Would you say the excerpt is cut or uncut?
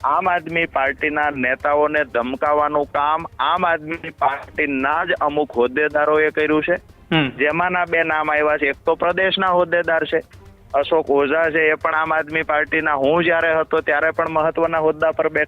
uncut